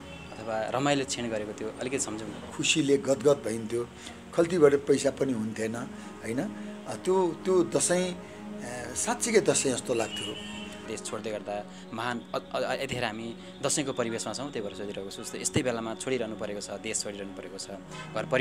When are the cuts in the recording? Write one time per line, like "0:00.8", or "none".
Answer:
0:02.5
0:10.9